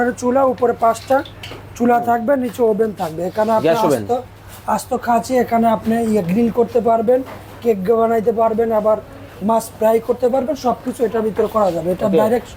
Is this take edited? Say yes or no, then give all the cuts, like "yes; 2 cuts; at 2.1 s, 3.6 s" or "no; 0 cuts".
no; 0 cuts